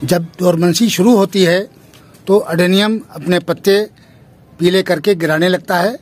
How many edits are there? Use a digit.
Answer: 0